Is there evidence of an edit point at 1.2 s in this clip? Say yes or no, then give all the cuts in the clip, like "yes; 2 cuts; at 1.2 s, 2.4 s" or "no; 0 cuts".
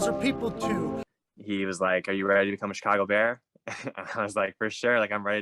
yes; 1 cut; at 1.2 s